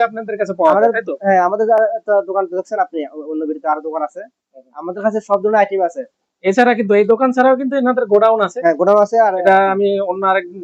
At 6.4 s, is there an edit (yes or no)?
no